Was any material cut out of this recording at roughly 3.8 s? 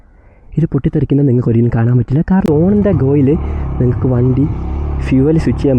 no; 1 cut; at 2.4 s

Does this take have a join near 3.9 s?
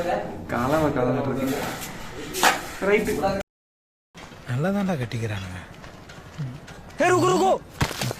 yes; 1 cut; at 3.9 s

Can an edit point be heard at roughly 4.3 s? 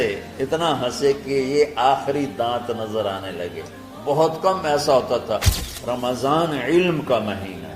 no; 1 cut; at 5.6 s

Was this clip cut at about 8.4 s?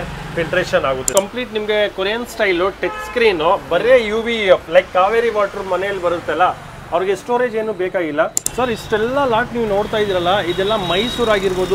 yes; 2 cuts; at 1.1 s, 8.4 s

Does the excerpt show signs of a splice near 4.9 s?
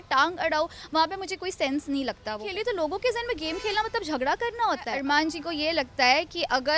yes; 2 cuts; at 2.4 s, 4.9 s

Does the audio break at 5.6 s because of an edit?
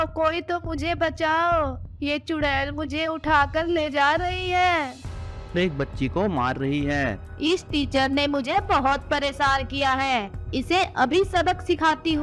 yes; 2 cuts; at 5.6 s, 7.2 s

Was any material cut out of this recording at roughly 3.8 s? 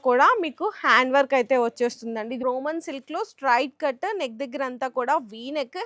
no; 1 cut; at 2.4 s

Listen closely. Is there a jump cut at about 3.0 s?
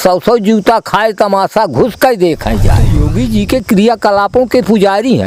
yes; 1 cut; at 3.0 s

